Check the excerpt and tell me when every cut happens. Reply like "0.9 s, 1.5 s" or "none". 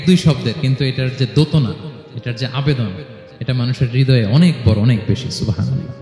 none